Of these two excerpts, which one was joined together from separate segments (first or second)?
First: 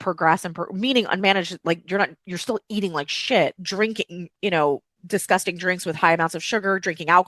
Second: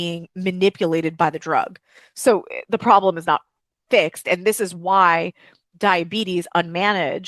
first